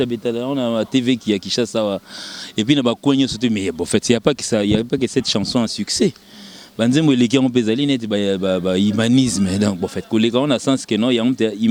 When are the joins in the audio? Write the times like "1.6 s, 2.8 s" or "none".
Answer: none